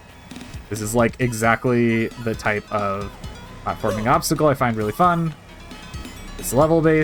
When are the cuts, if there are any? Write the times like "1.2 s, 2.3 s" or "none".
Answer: none